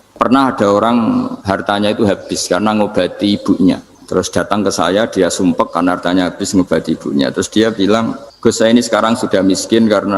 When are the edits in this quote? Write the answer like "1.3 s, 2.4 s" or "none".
1.4 s, 3.9 s, 8.2 s

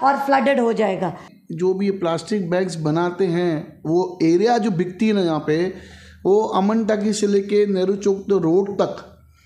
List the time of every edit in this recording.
1.3 s

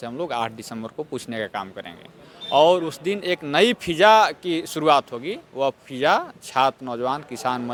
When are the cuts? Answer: none

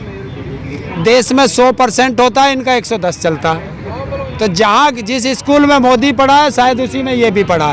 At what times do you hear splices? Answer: 4.3 s

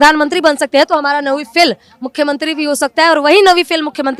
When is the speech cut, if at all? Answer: none

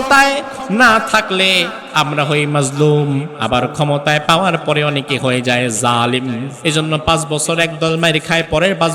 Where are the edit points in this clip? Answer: 6.5 s

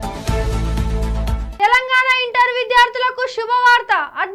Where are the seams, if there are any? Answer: 1.4 s

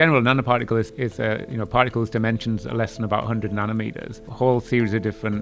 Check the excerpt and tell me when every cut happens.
0.9 s, 4.2 s

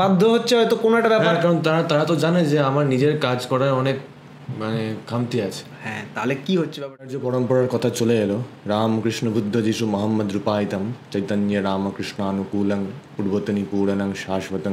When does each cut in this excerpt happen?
7.2 s

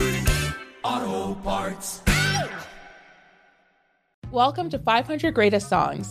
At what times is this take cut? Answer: 4.1 s

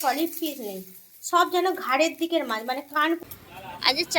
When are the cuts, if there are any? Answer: 3.2 s

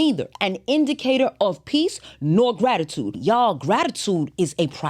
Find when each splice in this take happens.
3.2 s

